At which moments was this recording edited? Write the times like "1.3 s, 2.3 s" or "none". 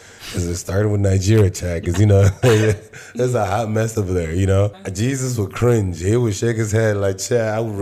4.8 s